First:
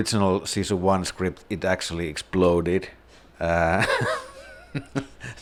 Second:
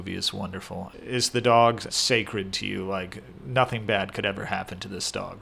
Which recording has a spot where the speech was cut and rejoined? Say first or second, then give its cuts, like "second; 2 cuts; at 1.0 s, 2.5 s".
second; 2 cuts; at 0.9 s, 1.9 s